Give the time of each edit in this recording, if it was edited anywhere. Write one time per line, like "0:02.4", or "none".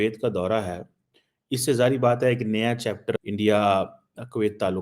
0:03.2